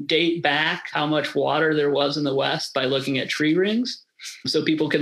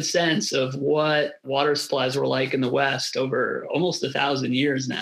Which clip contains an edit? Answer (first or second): first